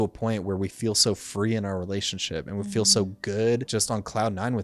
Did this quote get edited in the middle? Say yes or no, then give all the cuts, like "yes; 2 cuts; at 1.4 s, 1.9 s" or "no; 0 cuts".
yes; 1 cut; at 3.7 s